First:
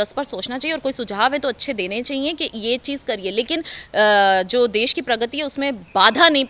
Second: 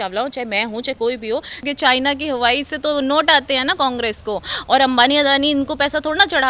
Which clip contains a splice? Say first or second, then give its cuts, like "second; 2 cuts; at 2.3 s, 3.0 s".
second; 1 cut; at 1.6 s